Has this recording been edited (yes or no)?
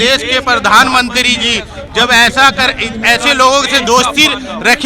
no